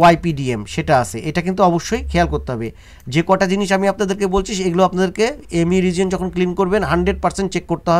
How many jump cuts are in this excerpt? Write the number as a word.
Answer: zero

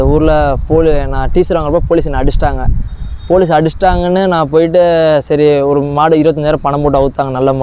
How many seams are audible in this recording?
zero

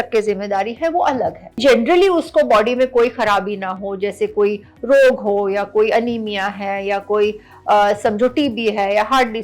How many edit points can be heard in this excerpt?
one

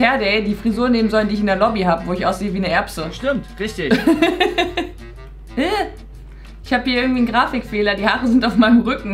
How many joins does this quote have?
one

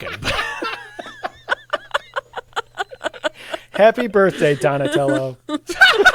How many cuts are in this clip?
zero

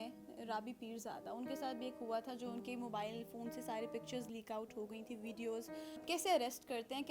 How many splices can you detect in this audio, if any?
one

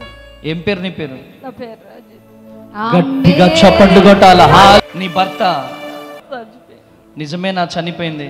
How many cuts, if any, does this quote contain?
two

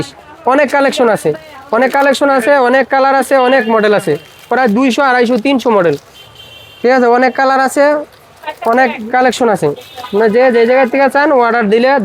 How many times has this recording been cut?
zero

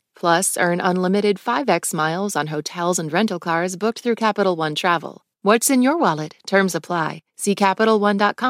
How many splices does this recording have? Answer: one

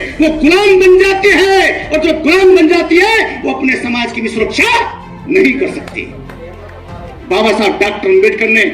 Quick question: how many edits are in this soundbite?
zero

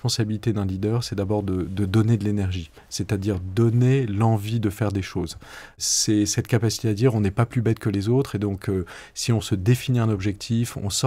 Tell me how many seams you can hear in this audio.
one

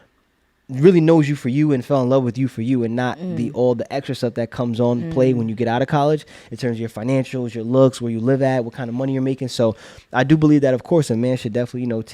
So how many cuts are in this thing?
zero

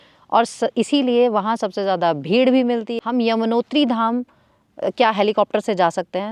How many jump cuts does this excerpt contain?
one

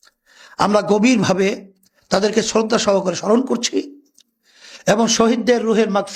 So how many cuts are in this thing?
zero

